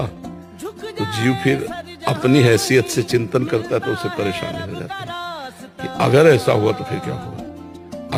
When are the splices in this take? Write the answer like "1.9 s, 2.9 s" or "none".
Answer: none